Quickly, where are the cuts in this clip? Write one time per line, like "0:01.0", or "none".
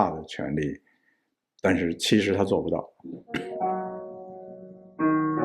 0:02.9